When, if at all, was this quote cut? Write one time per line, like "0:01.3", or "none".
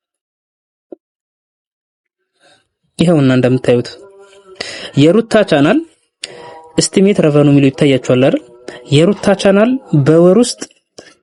none